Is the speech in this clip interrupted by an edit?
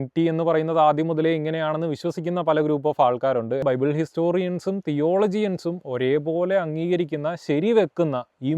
yes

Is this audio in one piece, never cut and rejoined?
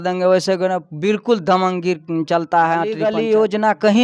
no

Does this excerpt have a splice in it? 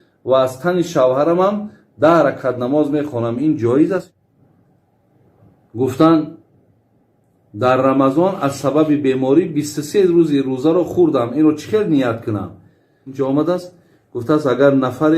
yes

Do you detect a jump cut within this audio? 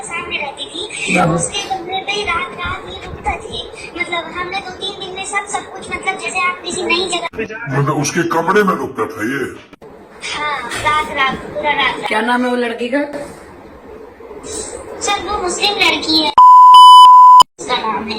no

